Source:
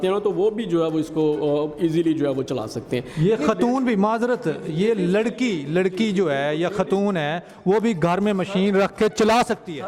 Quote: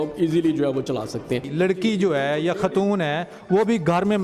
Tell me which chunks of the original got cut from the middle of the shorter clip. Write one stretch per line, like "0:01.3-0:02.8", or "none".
0:03.1-0:05.6